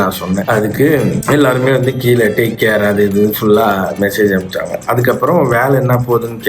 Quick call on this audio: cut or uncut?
cut